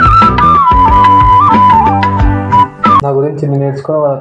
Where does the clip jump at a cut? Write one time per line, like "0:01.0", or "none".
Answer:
0:03.0